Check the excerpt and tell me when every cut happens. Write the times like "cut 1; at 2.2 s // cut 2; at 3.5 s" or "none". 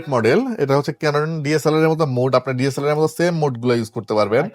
none